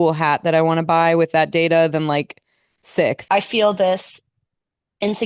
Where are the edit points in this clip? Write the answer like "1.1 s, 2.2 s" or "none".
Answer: 3.2 s